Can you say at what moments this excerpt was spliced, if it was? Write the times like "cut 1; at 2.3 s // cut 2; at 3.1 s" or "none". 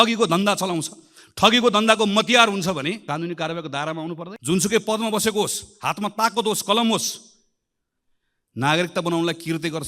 cut 1; at 3.0 s // cut 2; at 4.3 s